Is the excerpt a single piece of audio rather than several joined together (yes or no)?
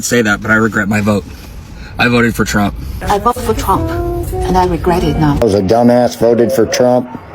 no